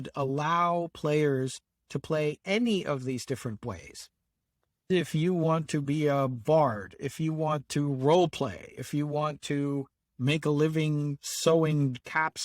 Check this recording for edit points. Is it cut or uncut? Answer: cut